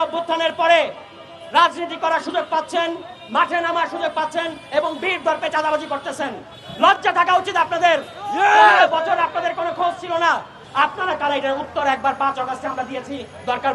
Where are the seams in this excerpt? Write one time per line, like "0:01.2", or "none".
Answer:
0:10.6